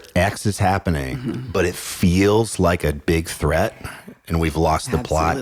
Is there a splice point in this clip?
no; 0 cuts

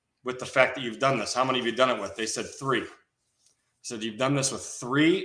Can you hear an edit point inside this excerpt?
no; 0 cuts

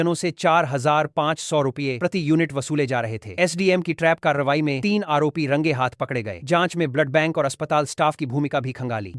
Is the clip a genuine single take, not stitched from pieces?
yes; 0 cuts

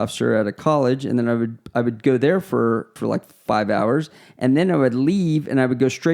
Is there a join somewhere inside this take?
yes; 1 cut; at 2.9 s

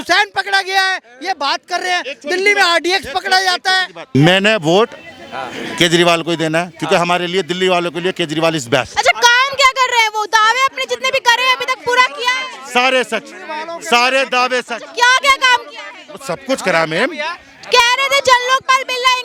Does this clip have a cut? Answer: no; 0 cuts

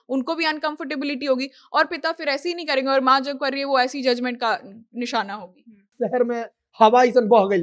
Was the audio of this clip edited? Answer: yes; 1 cut; at 5.9 s

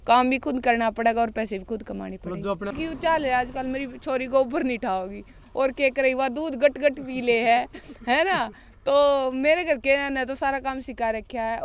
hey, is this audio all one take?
no; 1 cut; at 2.8 s

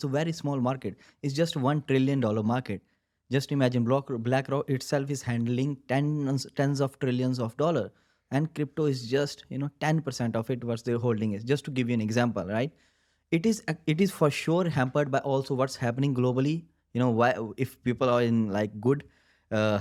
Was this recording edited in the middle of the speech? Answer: no; 0 cuts

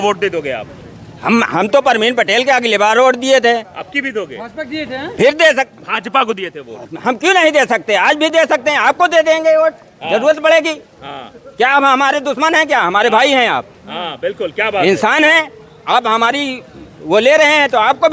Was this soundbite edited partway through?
no; 0 cuts

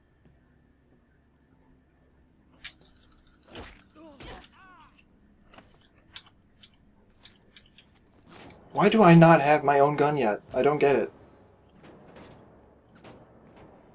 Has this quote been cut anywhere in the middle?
no; 0 cuts

